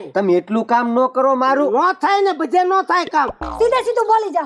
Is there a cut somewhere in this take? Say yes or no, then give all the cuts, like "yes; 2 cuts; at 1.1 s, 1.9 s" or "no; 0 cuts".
yes; 1 cut; at 3.4 s